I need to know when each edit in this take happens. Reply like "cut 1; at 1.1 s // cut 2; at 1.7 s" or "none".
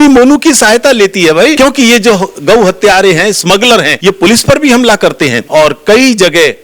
cut 1; at 1.6 s // cut 2; at 3.9 s // cut 3; at 5.4 s